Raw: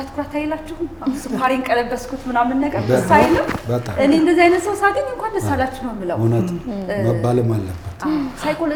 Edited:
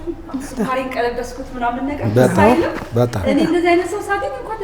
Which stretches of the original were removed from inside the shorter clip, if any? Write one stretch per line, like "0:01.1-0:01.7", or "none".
none